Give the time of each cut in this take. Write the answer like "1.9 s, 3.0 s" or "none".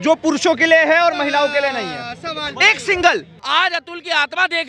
3.3 s

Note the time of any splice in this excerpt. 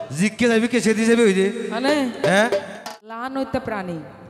2.7 s

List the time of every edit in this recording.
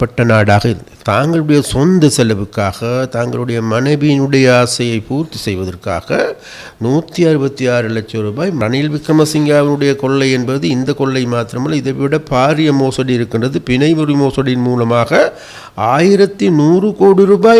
0.9 s, 8.6 s

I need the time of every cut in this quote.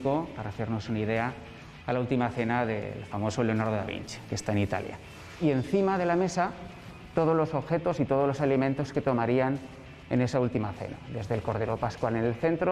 5.4 s

